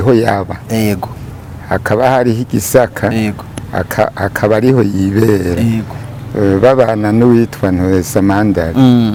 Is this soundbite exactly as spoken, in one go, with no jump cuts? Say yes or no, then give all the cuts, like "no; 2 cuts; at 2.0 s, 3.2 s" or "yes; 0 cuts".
yes; 0 cuts